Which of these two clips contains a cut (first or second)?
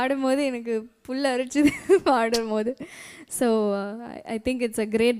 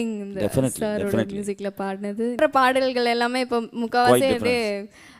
second